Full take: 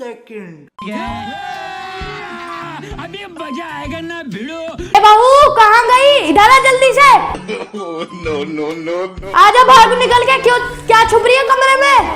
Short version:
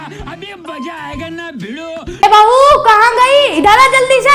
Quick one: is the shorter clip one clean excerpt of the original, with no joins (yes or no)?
yes